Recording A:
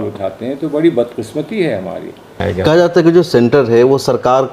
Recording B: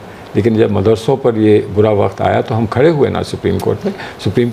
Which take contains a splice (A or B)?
A